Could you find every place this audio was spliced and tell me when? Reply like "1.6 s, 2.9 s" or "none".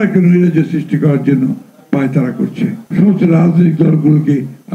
2.8 s